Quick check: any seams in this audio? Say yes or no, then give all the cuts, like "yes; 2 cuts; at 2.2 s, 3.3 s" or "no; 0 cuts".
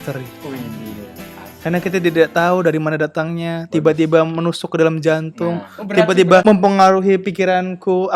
yes; 1 cut; at 6.4 s